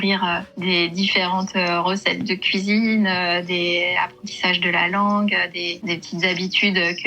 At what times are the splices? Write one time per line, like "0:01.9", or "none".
0:05.8